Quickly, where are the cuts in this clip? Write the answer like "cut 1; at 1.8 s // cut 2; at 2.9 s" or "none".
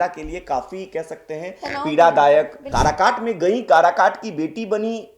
cut 1; at 2.6 s